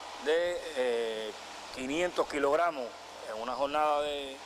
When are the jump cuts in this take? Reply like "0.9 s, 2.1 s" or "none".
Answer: 1.1 s